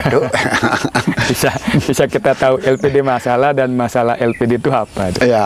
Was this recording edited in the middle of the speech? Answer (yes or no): no